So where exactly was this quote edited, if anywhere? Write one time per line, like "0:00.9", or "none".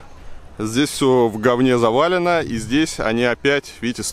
none